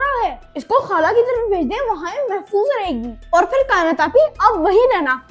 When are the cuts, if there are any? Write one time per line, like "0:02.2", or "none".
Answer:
none